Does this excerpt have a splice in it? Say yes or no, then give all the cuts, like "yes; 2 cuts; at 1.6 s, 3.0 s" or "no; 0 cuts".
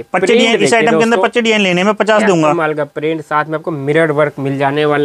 no; 0 cuts